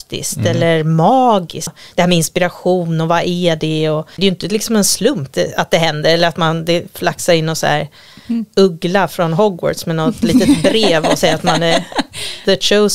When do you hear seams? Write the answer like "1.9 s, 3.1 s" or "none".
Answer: 1.8 s, 4.0 s, 5.3 s